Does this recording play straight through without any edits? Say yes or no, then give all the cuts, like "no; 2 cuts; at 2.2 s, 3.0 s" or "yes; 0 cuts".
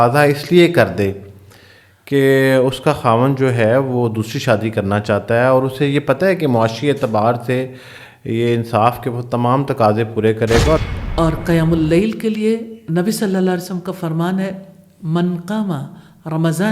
no; 1 cut; at 10.8 s